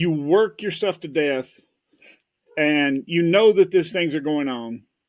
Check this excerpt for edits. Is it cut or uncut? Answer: uncut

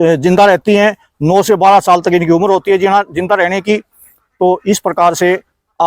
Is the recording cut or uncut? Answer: uncut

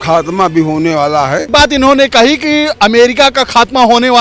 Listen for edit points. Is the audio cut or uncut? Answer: cut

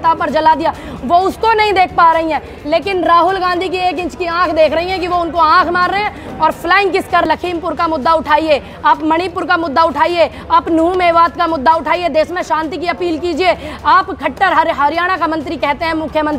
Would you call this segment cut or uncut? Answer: cut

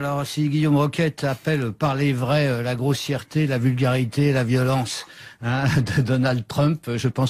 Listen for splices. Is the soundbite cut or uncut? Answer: uncut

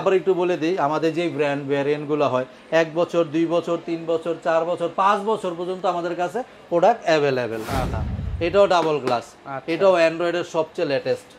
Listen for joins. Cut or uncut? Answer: cut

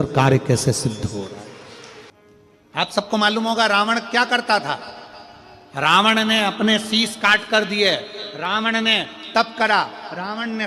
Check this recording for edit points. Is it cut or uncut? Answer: cut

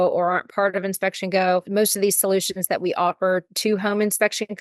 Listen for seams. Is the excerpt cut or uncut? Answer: cut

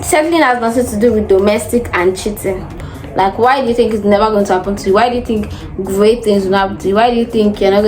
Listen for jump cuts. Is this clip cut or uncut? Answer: cut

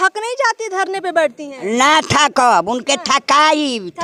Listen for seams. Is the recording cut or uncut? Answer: uncut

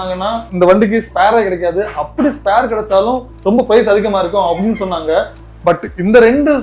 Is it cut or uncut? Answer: uncut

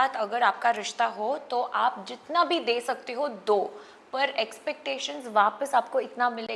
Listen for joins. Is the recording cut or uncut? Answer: uncut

